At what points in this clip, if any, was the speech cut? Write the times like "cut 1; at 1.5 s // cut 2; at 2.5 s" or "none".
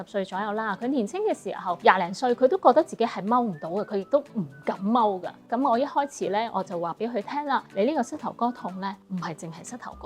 cut 1; at 5.4 s // cut 2; at 7.7 s // cut 3; at 9.0 s